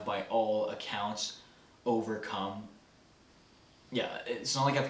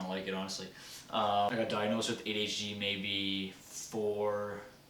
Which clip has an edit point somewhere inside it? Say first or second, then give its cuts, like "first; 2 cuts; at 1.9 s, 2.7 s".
second; 1 cut; at 1.5 s